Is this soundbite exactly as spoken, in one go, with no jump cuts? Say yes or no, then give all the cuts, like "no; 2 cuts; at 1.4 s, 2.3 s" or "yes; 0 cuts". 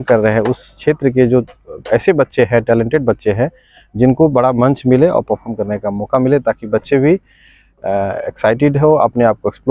yes; 0 cuts